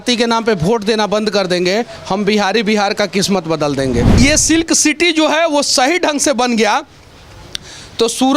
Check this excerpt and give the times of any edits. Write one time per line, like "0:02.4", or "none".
0:04.2